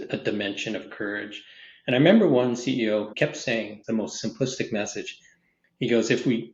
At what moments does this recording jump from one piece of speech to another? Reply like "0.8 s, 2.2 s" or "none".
3.7 s

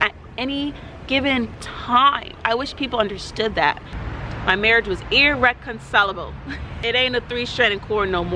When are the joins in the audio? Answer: 3.8 s, 6.8 s

